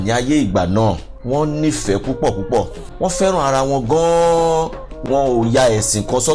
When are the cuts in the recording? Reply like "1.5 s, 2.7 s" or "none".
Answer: 1.1 s, 2.8 s, 5.0 s